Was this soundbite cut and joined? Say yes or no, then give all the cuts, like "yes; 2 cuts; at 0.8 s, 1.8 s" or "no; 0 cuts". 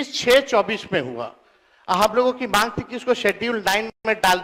no; 0 cuts